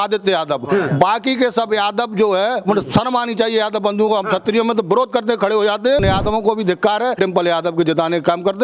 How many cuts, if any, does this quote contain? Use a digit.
2